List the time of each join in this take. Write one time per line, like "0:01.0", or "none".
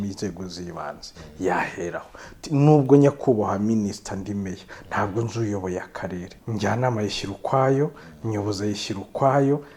0:06.3